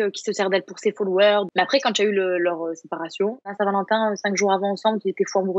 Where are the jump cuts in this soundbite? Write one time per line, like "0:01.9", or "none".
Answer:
0:01.5
0:03.5